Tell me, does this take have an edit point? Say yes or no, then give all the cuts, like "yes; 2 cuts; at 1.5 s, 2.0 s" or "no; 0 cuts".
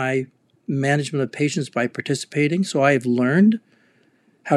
no; 0 cuts